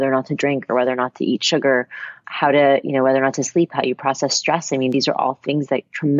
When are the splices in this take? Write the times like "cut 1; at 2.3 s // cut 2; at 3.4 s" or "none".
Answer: none